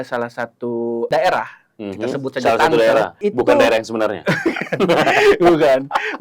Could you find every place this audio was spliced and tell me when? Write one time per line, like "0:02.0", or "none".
0:01.1
0:03.2